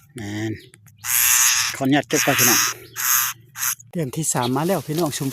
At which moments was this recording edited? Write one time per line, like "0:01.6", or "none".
0:04.1

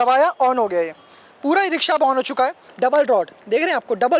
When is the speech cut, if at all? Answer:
0:02.5

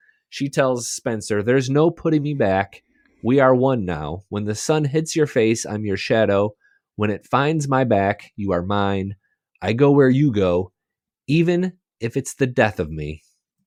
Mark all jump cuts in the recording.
none

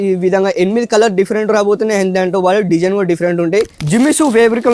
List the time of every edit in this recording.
0:03.8

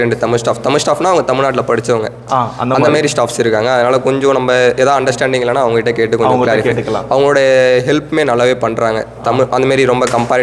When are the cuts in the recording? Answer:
none

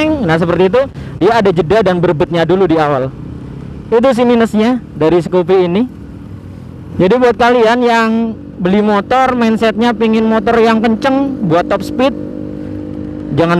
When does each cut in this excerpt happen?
0:06.9

